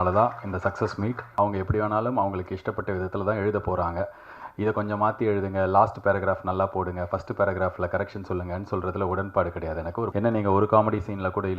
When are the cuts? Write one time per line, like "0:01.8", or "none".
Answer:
0:01.3
0:10.1